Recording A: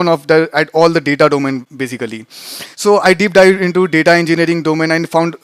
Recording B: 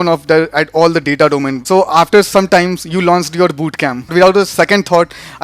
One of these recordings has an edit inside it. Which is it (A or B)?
B